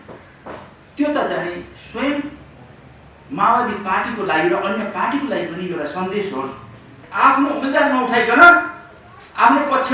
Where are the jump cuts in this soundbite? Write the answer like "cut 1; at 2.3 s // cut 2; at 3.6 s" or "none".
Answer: cut 1; at 7.0 s